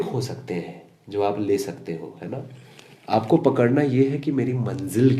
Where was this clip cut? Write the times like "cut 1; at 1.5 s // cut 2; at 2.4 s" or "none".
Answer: none